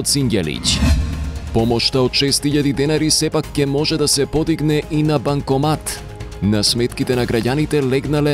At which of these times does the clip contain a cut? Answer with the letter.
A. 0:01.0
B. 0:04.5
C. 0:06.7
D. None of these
A